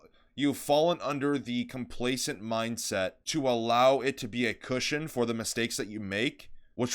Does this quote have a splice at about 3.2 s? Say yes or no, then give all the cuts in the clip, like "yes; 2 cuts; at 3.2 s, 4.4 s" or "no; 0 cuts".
yes; 1 cut; at 3.2 s